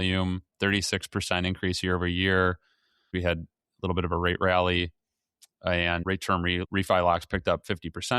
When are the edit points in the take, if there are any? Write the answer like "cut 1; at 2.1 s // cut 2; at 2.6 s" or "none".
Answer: cut 1; at 3.1 s // cut 2; at 6.3 s